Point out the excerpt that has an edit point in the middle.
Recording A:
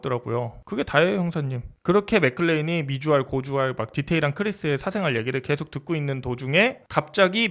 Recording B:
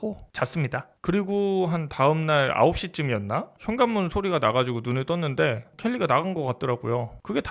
B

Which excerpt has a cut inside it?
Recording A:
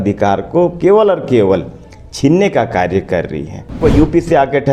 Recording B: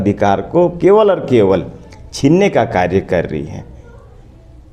A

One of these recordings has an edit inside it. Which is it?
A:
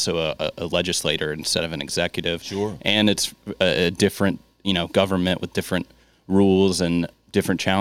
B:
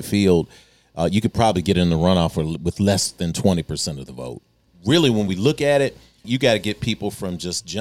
B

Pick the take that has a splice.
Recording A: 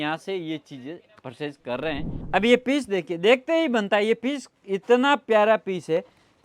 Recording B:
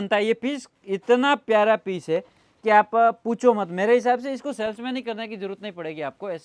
A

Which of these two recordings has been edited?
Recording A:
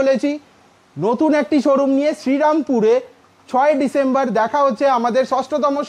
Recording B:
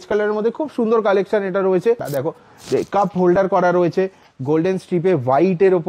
B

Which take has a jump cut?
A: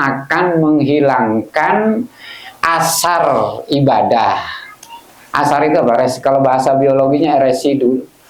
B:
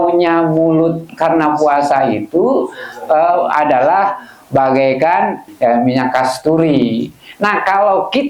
B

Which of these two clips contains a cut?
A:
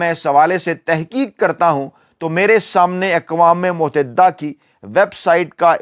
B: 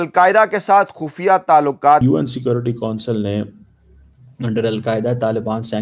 B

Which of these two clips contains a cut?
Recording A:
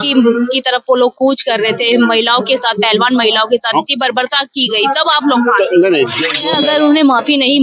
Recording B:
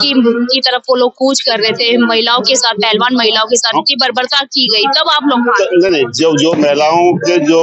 A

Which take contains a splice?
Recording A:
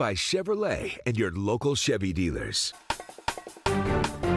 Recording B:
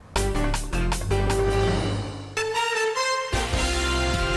A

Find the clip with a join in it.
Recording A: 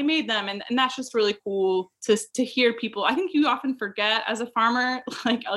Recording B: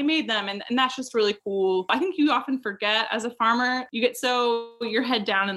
B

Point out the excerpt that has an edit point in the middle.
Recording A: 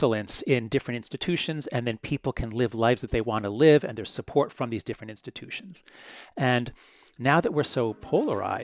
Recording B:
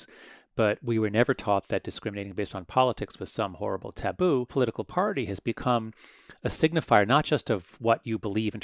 B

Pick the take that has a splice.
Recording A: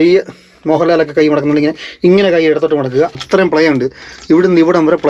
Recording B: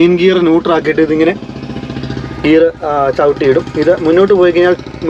A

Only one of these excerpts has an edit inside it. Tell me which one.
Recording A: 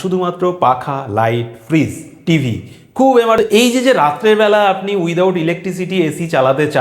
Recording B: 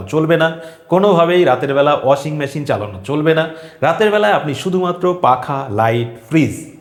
A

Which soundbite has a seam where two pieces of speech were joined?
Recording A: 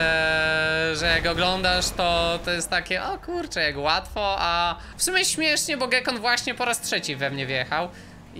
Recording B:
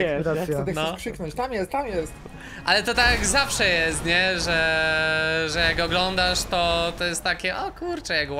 A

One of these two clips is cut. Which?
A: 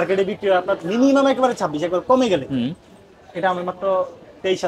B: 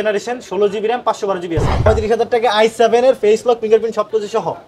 B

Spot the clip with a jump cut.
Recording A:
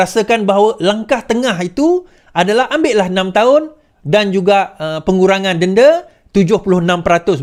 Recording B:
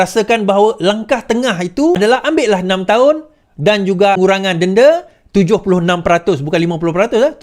B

